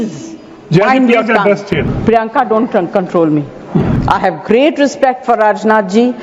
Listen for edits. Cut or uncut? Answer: cut